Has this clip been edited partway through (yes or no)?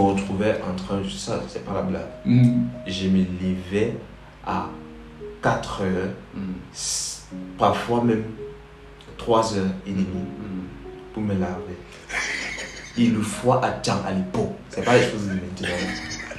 no